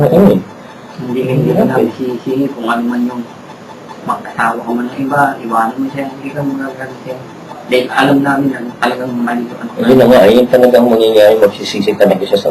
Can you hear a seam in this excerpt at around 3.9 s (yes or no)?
no